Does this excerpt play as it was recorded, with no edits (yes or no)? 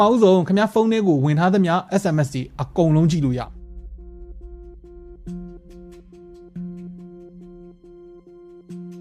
yes